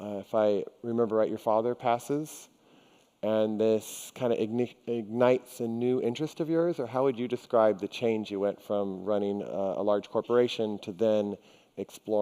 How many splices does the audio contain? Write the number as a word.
one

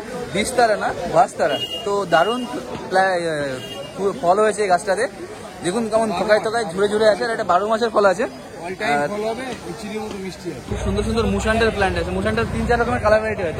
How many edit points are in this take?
one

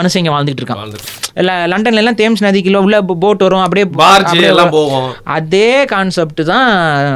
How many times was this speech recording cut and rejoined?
one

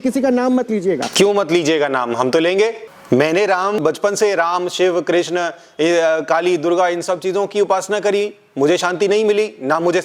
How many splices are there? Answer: three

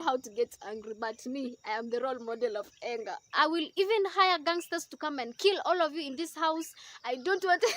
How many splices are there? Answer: one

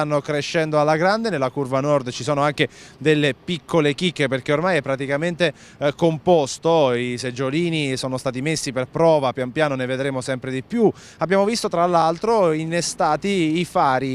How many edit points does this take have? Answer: one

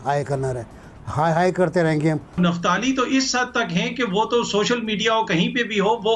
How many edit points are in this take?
one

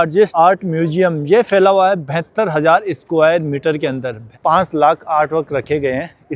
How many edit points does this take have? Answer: zero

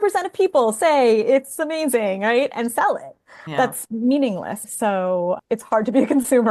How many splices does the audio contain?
two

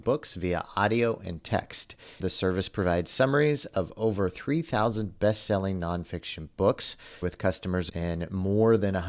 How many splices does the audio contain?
two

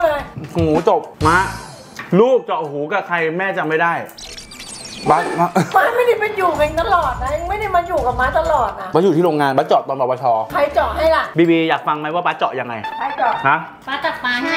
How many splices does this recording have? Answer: zero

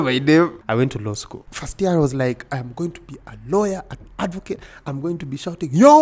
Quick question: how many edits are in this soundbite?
one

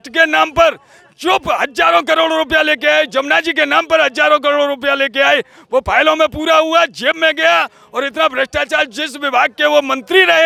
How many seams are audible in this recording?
zero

